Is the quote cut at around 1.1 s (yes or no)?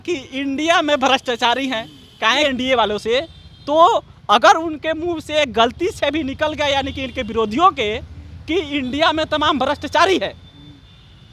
no